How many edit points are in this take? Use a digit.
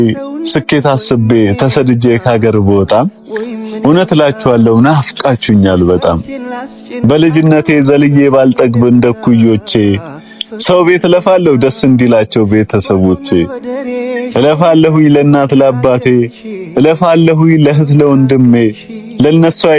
0